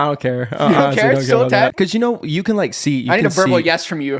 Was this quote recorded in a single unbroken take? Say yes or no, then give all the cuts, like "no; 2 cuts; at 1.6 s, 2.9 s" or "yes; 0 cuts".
no; 1 cut; at 1.7 s